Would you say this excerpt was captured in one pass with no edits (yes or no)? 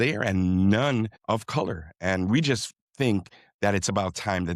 no